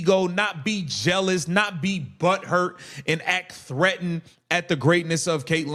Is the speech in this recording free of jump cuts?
yes; 0 cuts

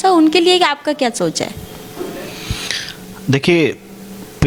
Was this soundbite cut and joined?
no; 0 cuts

